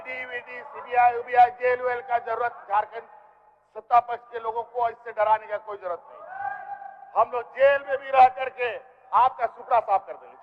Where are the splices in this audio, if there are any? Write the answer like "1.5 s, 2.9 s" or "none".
none

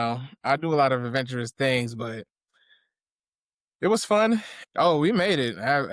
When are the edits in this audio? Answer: 4.6 s

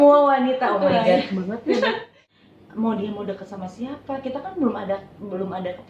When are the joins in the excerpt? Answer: 2.2 s

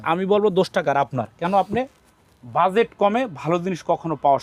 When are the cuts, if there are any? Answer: none

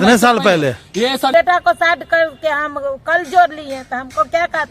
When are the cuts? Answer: 1.3 s

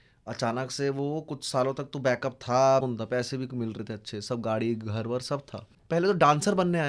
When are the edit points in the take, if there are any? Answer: 2.8 s, 5.7 s

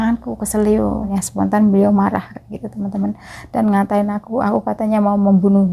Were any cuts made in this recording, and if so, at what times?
1.2 s

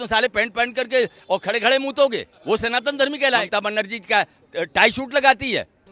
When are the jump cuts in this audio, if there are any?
2.3 s, 3.5 s

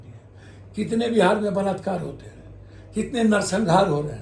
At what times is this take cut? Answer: none

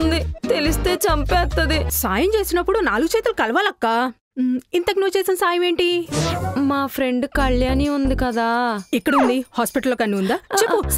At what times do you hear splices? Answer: 1.9 s

